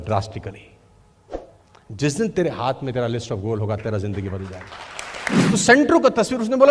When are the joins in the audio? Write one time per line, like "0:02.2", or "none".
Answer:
0:05.4